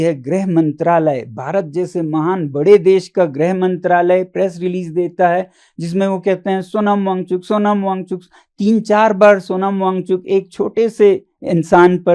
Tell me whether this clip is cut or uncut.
uncut